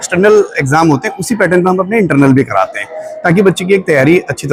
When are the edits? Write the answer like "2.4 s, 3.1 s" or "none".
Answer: none